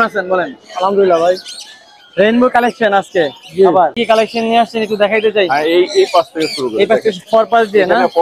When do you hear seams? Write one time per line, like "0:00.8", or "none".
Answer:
0:04.0